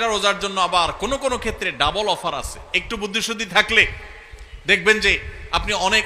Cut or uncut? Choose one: uncut